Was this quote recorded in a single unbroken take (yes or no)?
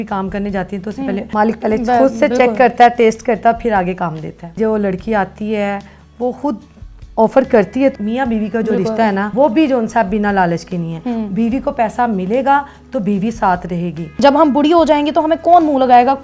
no